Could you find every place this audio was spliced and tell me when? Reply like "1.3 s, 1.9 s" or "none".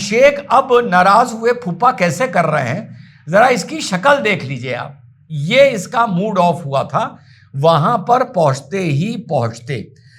none